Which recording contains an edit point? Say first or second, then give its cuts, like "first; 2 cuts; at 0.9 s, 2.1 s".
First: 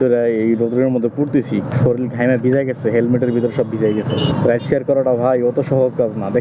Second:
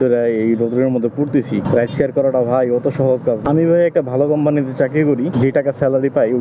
second; 3 cuts; at 1.7 s, 3.4 s, 5.3 s